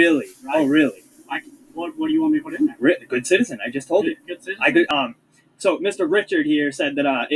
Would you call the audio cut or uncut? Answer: cut